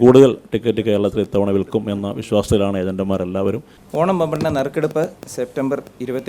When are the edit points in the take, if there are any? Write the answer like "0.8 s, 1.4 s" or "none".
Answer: 3.7 s